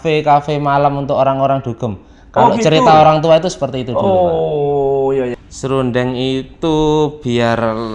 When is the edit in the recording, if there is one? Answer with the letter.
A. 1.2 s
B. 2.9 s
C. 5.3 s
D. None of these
C